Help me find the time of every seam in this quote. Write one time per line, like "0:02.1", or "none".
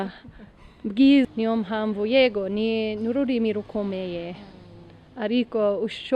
0:01.3